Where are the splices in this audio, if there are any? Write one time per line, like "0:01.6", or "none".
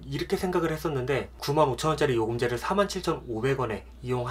0:01.4

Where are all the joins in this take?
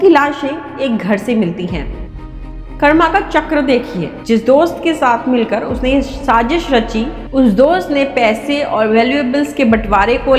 0:02.1

